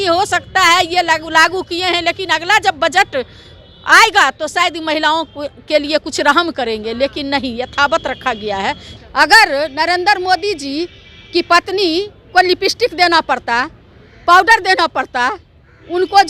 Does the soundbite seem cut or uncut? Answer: cut